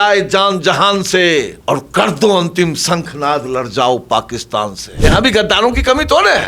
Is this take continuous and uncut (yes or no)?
no